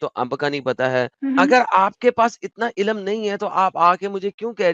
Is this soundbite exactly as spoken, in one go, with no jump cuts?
no; 1 cut; at 1.1 s

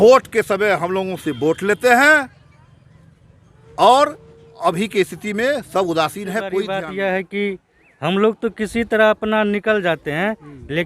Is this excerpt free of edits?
no; 1 cut; at 6.7 s

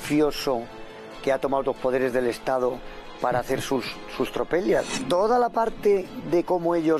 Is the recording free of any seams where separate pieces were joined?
yes; 0 cuts

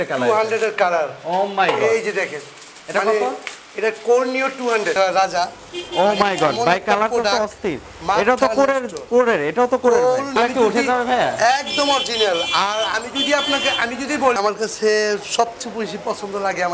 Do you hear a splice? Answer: yes; 3 cuts; at 5.0 s, 10.3 s, 14.4 s

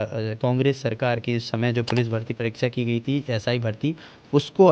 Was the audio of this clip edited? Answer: no; 0 cuts

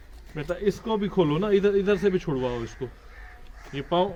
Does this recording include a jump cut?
no; 0 cuts

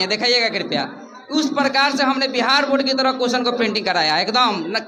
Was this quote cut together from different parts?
no; 0 cuts

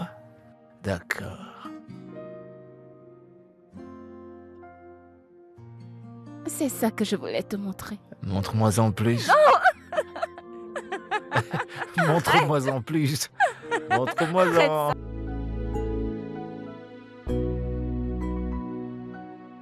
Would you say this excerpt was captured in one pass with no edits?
no; 1 cut; at 14.9 s

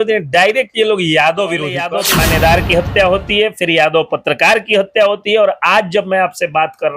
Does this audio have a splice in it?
yes; 1 cut; at 1.9 s

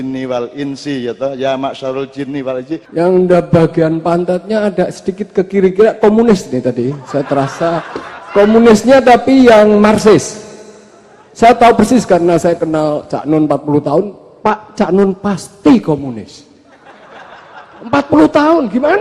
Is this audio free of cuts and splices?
no; 1 cut; at 2.9 s

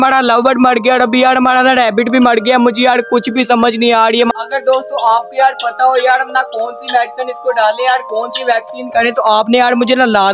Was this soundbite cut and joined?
no; 0 cuts

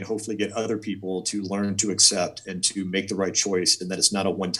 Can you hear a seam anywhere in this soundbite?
no; 0 cuts

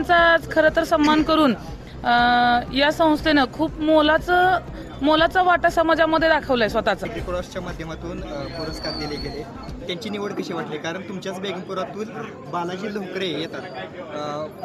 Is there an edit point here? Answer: yes; 1 cut; at 7.1 s

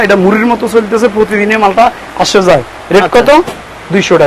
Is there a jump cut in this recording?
no; 0 cuts

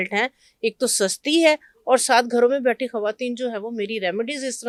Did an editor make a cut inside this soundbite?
no; 0 cuts

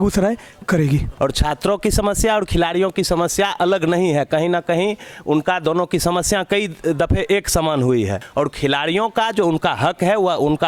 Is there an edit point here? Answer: yes; 2 cuts; at 1.1 s, 8.2 s

